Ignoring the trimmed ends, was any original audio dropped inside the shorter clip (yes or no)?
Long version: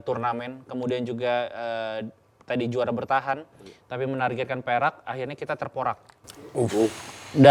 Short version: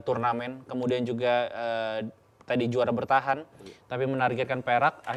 no